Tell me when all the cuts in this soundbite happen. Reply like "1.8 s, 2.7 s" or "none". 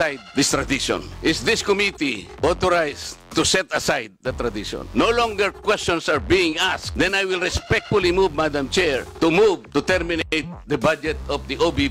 1.1 s, 4.9 s